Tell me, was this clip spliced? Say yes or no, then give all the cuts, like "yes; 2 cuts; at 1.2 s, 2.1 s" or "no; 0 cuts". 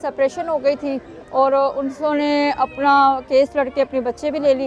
no; 0 cuts